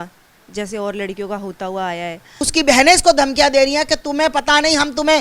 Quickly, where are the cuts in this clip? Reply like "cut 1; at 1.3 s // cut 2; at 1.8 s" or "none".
cut 1; at 2.5 s